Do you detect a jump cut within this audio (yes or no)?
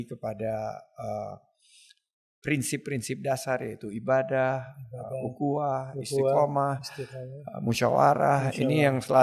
no